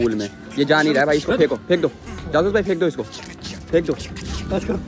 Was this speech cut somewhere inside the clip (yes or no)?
no